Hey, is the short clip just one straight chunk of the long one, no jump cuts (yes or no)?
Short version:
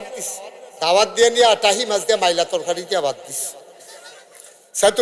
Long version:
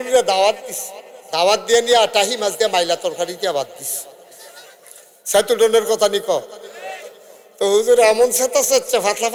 yes